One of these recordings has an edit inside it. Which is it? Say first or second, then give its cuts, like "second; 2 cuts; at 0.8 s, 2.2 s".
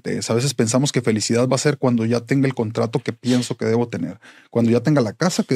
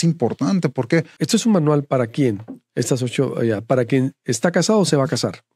second; 1 cut; at 1.2 s